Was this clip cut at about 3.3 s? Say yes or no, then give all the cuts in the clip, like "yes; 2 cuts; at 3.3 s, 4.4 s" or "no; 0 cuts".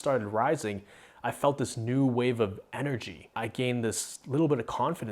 yes; 1 cut; at 3.3 s